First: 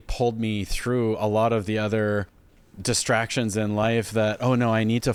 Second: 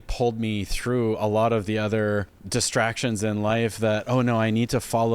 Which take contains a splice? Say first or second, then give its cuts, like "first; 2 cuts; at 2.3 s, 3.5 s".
second; 1 cut; at 2.4 s